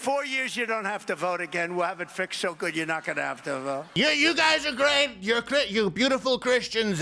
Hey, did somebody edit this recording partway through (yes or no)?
yes